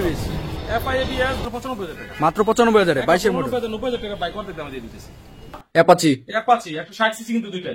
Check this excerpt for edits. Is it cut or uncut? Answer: cut